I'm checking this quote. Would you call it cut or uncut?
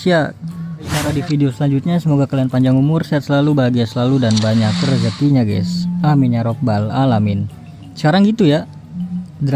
cut